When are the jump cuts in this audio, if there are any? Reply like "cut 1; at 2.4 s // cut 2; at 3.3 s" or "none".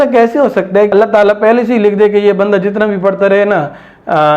cut 1; at 0.9 s